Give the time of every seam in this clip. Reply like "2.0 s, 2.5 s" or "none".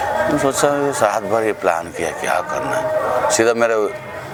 none